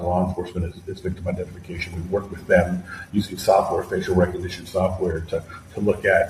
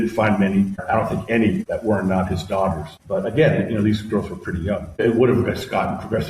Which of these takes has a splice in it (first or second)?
second